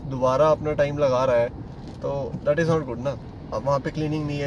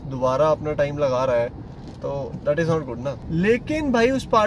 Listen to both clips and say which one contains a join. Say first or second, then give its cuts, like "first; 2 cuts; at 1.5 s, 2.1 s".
second; 1 cut; at 3.2 s